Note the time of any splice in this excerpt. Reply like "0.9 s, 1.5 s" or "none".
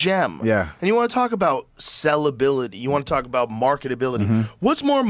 none

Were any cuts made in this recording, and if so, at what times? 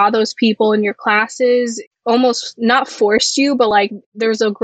1.8 s

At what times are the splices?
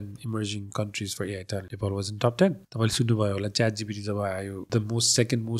1.7 s, 2.7 s, 4.6 s

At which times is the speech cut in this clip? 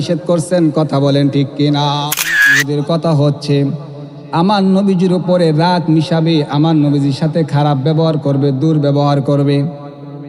2.6 s

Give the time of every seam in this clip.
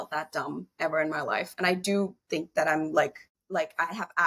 3.3 s

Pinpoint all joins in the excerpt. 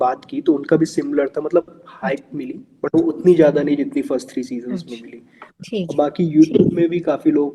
none

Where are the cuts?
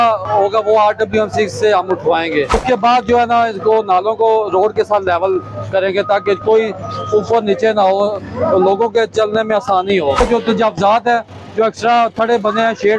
2.6 s, 10.2 s

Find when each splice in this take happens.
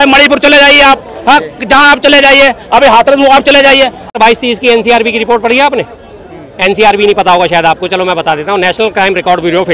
4.2 s

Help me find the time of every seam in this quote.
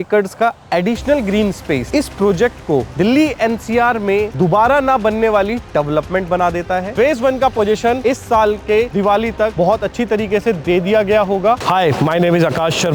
6.9 s, 11.6 s

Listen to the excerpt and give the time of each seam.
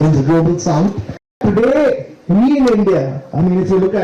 1.4 s

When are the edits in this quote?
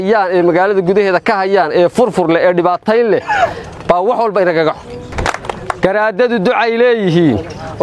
5.1 s

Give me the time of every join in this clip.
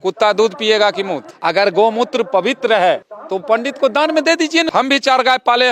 1.2 s, 4.7 s

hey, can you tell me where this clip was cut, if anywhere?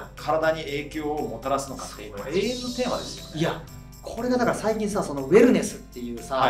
none

